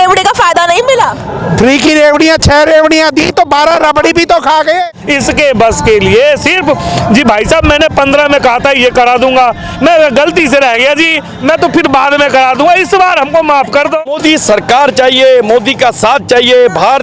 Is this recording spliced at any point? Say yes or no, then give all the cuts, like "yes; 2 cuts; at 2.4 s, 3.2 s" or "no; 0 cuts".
yes; 2 cuts; at 4.8 s, 14.0 s